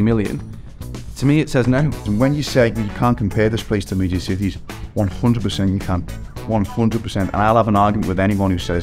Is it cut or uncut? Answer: cut